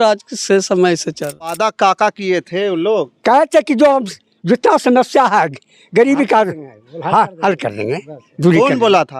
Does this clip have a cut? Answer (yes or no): yes